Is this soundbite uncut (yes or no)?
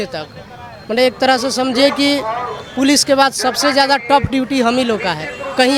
yes